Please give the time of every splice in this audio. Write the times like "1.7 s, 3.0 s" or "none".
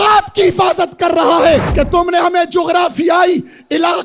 1.7 s